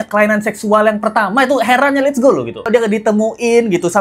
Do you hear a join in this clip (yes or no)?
yes